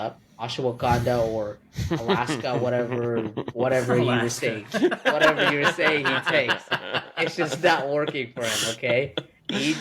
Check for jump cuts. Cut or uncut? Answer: uncut